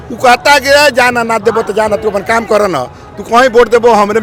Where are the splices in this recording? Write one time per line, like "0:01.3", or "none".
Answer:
none